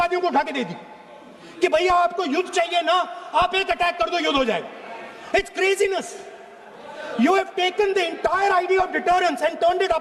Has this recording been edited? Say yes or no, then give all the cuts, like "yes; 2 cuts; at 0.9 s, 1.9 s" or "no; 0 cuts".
no; 0 cuts